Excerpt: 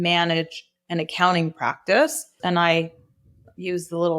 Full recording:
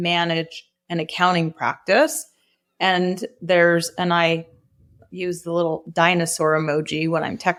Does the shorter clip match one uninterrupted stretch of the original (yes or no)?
no